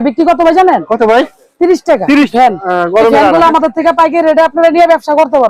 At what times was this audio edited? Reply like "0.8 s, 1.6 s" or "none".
2.3 s